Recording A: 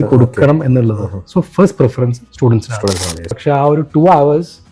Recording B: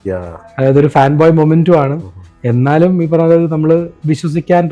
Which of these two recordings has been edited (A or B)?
A